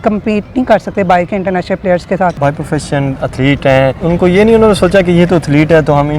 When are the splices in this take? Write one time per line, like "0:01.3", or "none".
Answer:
0:02.4
0:04.0